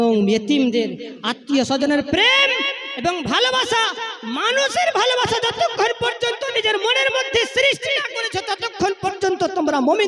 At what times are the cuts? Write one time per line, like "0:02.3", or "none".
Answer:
none